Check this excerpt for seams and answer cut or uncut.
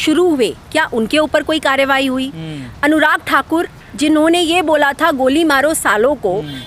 uncut